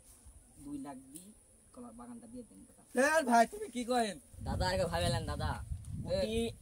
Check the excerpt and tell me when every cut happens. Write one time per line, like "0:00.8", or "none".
0:04.4